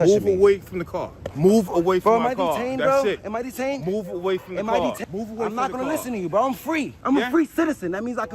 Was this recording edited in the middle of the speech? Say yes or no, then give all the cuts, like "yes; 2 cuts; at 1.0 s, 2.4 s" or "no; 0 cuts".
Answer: yes; 3 cuts; at 1.3 s, 5.0 s, 6.9 s